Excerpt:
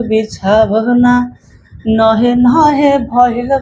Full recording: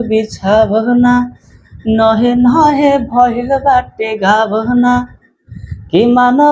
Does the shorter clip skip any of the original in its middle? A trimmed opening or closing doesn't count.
no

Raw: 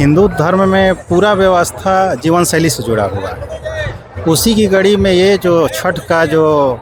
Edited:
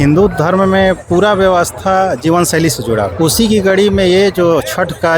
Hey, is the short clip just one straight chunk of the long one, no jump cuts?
no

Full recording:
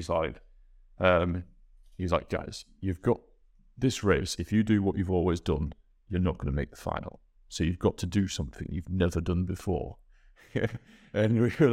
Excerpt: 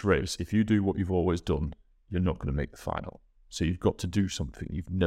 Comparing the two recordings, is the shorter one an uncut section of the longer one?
yes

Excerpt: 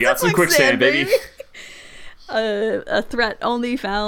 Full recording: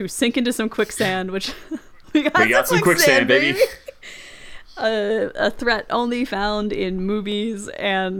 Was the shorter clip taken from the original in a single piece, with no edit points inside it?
yes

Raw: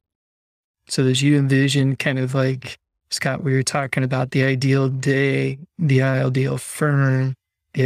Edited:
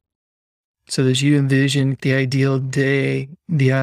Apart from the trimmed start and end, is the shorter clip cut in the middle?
yes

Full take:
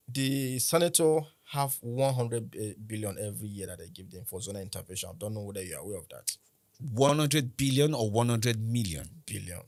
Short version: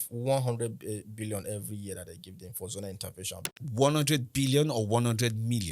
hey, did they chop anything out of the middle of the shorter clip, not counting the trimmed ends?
yes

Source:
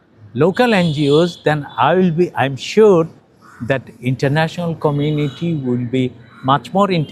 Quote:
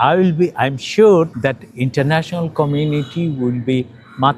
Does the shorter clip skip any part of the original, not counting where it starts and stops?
yes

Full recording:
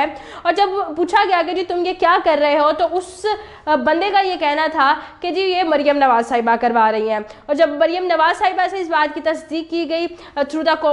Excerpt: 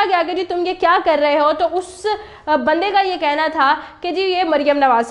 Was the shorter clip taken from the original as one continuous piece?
yes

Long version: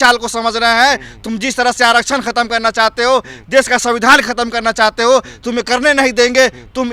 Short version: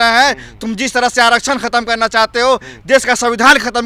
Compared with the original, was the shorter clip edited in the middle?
no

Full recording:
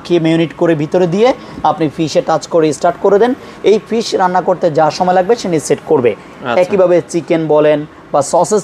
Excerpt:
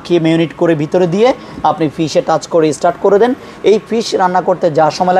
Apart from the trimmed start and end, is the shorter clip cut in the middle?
no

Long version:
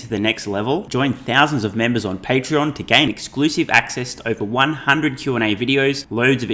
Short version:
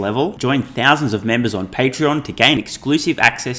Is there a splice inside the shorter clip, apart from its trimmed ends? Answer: no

